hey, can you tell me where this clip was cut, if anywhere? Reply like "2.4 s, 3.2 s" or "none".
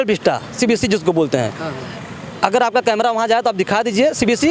none